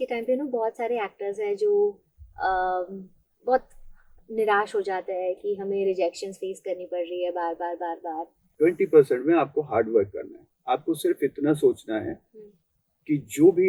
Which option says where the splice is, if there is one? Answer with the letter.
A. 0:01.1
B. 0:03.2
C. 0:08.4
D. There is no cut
C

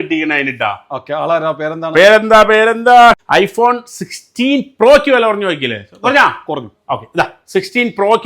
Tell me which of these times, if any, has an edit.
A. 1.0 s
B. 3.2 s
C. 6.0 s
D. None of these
B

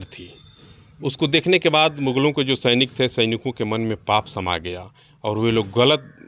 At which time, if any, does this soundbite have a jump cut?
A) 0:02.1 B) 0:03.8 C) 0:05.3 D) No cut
D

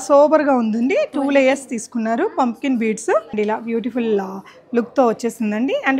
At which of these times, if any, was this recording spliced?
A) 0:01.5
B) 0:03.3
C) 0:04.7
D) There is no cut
B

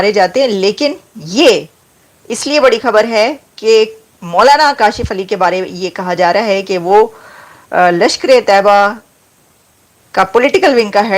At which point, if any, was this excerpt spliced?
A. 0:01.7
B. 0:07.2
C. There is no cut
C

